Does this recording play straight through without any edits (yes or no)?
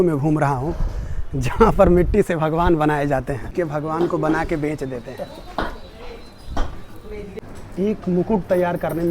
no